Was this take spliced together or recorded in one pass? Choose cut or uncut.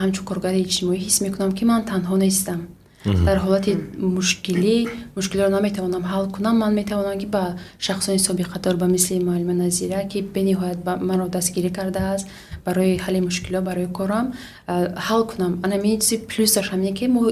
uncut